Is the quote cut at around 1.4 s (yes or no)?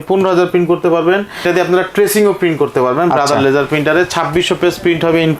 yes